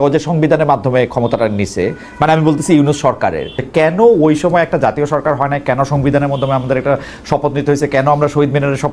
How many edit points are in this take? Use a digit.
1